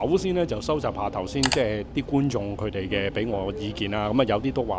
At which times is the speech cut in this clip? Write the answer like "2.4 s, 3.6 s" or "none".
none